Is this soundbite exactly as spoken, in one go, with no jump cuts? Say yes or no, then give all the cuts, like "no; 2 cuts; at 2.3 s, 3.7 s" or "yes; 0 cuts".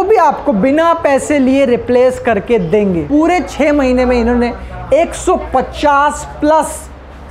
no; 1 cut; at 3.0 s